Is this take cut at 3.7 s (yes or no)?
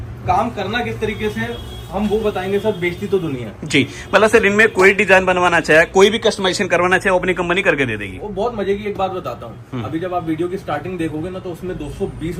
no